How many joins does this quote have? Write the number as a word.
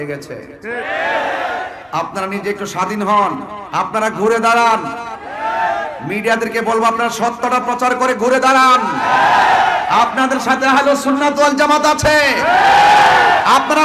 two